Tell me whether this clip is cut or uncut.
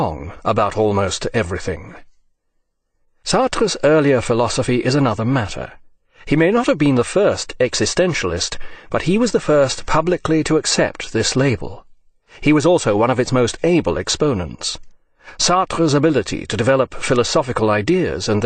uncut